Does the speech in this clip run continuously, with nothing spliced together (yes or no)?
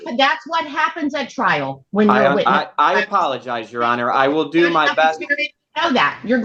yes